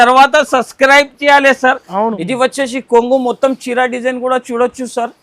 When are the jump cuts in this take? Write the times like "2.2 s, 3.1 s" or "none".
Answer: 2.2 s